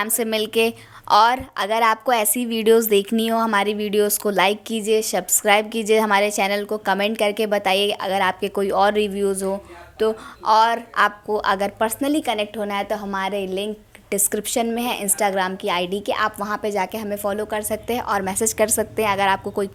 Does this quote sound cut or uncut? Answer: uncut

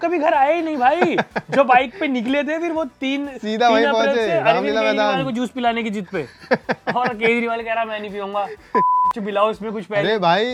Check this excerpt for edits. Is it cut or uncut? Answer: uncut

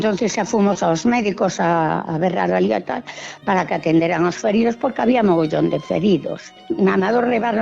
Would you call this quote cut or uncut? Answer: cut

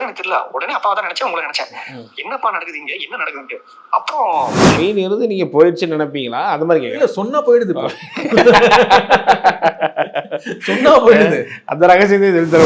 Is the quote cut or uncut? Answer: cut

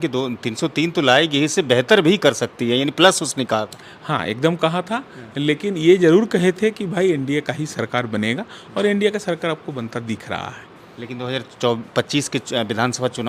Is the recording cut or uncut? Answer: uncut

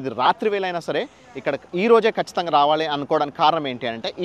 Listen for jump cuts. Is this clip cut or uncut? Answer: uncut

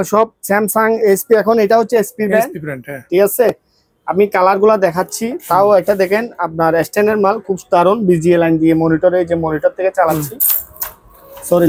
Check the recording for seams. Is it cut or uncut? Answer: uncut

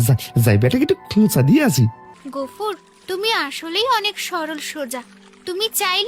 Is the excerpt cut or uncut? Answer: cut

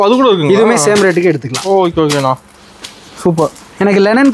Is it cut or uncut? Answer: uncut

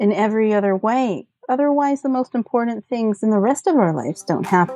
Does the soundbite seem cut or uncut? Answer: uncut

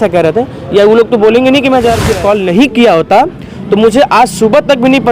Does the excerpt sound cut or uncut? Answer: cut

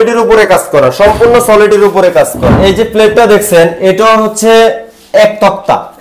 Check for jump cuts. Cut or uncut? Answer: cut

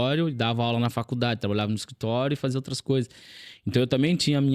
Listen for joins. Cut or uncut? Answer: uncut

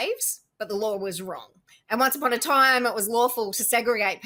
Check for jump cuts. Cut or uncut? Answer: uncut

